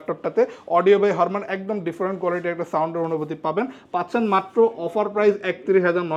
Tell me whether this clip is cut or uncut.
uncut